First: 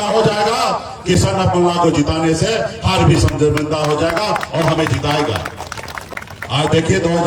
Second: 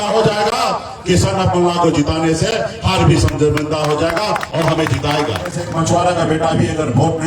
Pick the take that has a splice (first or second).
second